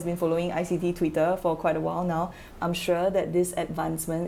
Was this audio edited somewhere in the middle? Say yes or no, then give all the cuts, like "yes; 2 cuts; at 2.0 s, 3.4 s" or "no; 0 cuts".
no; 0 cuts